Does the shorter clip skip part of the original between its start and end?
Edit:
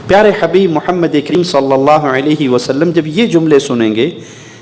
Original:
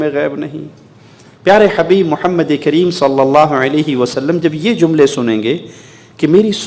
yes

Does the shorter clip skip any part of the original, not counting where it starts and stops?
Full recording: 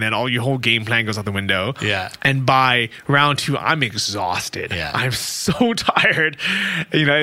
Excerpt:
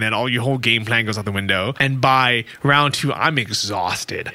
yes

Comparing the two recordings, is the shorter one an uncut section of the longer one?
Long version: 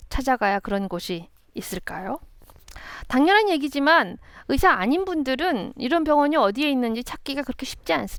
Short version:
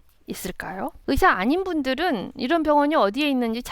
no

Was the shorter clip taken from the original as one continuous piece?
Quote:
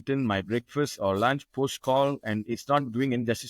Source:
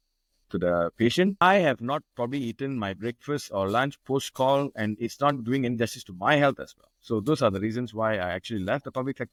yes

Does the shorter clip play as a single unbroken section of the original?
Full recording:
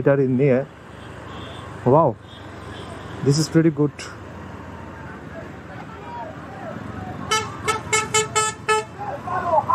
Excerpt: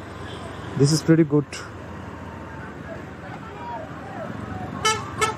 yes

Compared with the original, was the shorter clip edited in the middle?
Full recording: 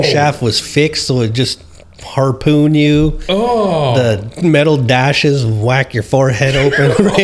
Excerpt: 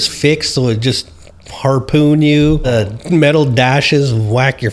yes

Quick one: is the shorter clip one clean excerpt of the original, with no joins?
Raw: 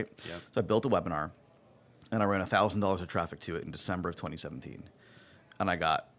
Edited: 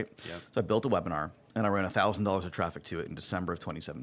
no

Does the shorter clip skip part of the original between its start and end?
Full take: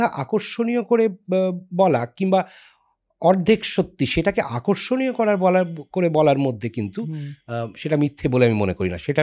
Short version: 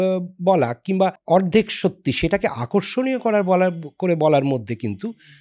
yes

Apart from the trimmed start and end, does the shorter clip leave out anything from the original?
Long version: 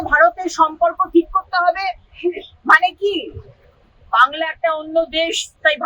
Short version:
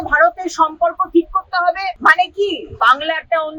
yes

